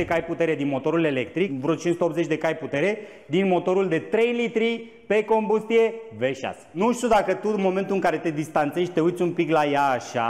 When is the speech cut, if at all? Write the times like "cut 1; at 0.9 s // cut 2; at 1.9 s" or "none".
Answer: cut 1; at 1.6 s // cut 2; at 6.8 s